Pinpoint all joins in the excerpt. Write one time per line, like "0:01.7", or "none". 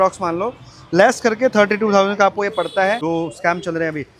0:03.0